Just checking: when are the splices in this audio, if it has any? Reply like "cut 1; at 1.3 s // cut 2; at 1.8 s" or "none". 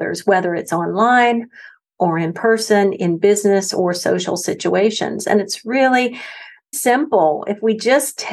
cut 1; at 6.7 s